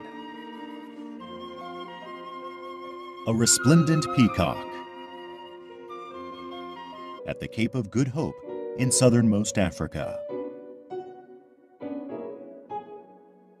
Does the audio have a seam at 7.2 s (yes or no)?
no